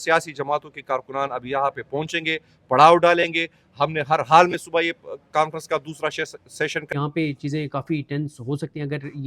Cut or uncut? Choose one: cut